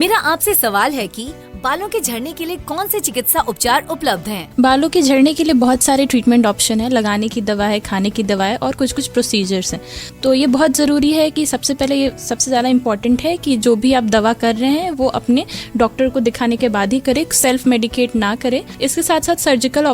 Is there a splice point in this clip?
yes; 1 cut; at 0.9 s

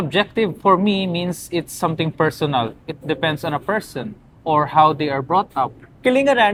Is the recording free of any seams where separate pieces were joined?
yes; 0 cuts

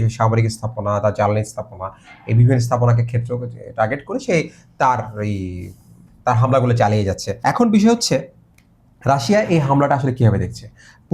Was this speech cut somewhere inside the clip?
yes; 1 cut; at 7.3 s

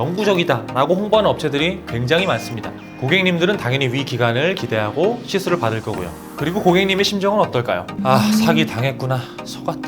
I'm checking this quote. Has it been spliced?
yes; 1 cut; at 6.2 s

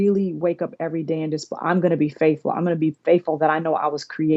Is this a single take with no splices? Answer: yes; 0 cuts

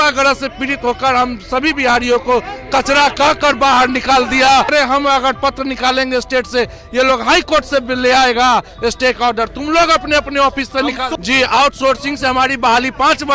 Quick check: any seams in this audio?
yes; 2 cuts; at 4.7 s, 11.1 s

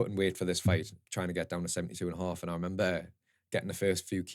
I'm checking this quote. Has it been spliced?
yes; 1 cut; at 1.0 s

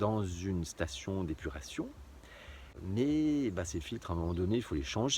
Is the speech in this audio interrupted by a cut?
yes; 1 cut; at 2.6 s

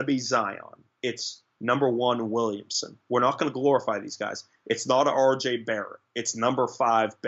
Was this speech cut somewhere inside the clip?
no; 0 cuts

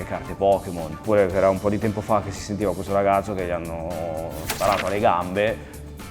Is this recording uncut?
yes; 0 cuts

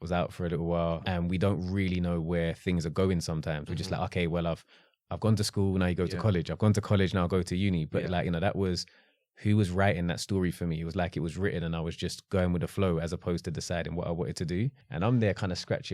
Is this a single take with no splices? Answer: no; 2 cuts; at 1.0 s, 14.8 s

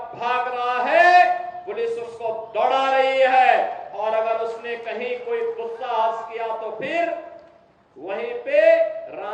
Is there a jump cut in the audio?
no; 0 cuts

